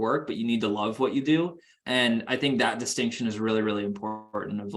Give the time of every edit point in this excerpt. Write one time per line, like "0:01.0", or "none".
0:01.7